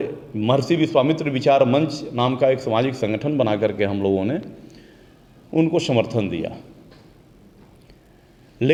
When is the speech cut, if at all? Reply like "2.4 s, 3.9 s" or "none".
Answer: none